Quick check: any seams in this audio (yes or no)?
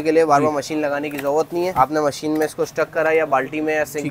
yes